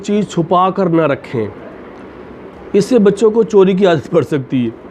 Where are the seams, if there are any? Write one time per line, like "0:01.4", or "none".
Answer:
none